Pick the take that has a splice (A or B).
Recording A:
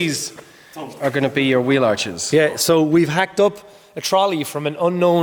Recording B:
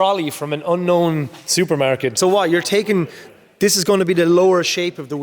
B